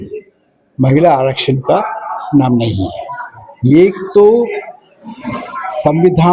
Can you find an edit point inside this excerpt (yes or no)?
no